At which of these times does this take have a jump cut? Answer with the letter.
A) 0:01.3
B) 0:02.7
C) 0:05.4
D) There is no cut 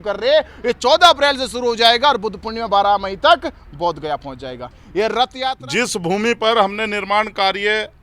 C